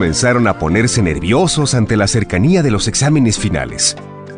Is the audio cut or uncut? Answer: uncut